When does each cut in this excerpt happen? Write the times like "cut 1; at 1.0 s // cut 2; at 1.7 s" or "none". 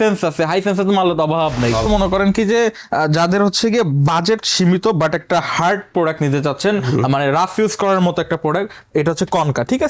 cut 1; at 1.9 s